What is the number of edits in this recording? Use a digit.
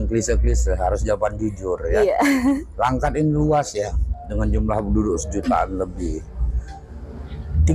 0